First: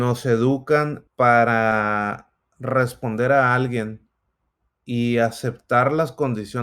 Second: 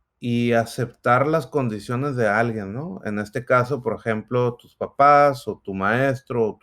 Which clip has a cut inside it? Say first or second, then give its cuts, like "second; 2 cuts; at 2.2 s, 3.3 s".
first; 1 cut; at 1.0 s